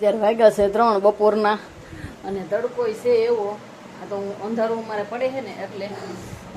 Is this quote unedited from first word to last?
yes; 0 cuts

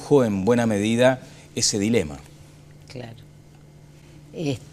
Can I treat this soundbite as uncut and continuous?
no; 1 cut; at 1.7 s

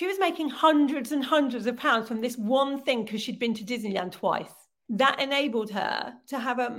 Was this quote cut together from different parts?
yes; 1 cut; at 4.7 s

